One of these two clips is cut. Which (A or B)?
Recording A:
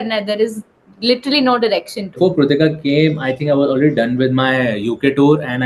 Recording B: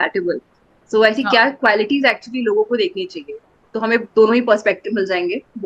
A